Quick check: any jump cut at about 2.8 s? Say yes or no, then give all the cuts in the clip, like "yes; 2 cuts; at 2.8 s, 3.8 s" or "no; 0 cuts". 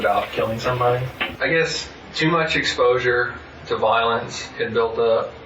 no; 1 cut; at 1.2 s